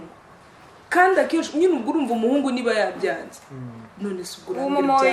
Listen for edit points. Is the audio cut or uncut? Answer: uncut